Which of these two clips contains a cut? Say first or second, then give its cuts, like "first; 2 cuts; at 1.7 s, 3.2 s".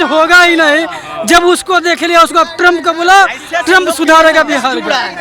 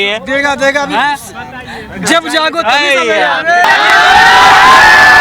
second; 1 cut; at 3.6 s